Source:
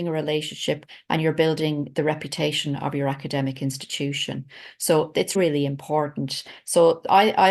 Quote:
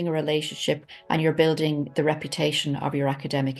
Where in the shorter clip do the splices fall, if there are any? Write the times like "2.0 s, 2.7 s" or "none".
none